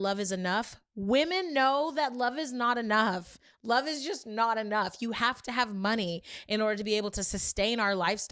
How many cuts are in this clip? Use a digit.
1